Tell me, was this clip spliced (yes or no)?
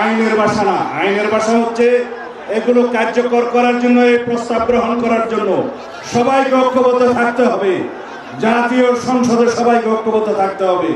no